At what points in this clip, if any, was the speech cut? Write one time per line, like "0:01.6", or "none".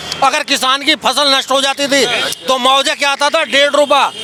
none